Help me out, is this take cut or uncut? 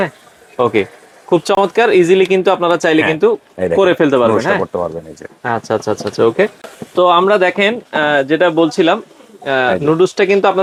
uncut